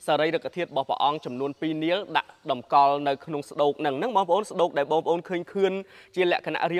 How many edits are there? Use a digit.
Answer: 0